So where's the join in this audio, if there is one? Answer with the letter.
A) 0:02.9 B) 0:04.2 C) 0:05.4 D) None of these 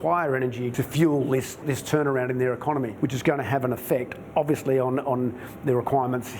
A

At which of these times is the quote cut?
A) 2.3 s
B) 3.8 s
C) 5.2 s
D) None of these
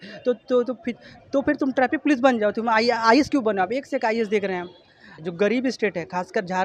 C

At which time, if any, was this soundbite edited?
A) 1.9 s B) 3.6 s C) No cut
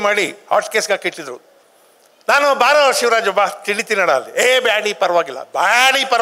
C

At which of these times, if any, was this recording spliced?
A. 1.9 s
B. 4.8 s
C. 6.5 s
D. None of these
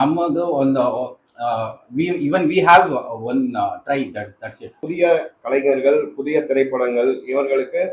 B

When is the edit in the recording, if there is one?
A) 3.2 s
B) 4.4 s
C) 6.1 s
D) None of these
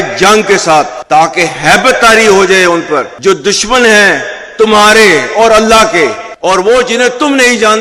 D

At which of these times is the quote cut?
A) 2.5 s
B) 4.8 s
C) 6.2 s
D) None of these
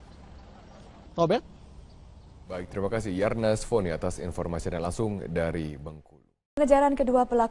A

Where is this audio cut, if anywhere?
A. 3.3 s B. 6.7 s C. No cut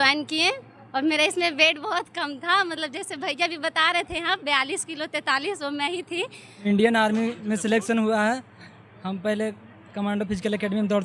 B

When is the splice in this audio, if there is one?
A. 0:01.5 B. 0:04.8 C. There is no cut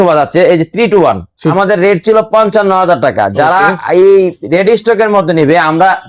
A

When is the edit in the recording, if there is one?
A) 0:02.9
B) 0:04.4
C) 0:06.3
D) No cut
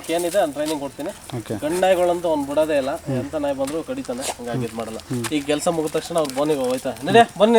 D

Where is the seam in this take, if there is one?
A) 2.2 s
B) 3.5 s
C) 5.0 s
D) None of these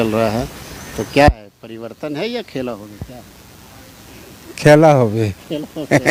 D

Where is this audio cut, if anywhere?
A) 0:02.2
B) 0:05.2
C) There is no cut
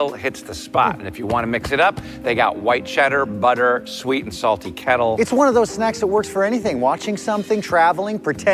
B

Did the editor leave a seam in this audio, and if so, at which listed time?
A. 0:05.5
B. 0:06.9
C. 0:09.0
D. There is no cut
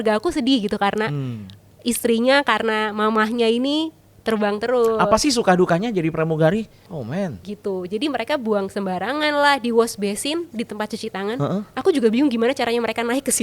B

